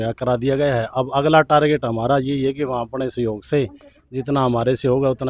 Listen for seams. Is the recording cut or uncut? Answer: uncut